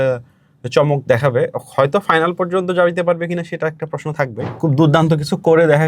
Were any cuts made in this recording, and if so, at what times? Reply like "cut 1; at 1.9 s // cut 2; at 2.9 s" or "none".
cut 1; at 4.5 s